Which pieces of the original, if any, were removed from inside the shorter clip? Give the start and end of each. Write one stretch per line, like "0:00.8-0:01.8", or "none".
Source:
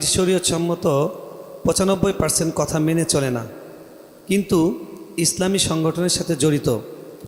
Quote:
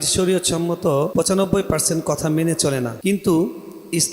0:01.1-0:01.6
0:03.4-0:04.2